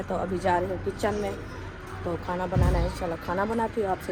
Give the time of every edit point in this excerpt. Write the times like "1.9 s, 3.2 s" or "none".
none